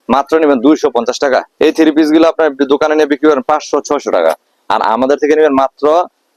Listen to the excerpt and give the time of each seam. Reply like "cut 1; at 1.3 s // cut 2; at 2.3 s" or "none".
cut 1; at 1.5 s